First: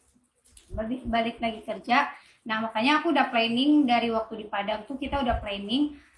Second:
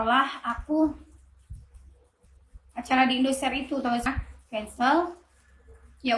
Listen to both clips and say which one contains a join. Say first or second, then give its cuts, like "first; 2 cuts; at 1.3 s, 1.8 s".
second; 1 cut; at 4.0 s